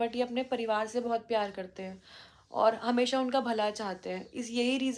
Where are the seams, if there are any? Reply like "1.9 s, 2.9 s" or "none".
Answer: none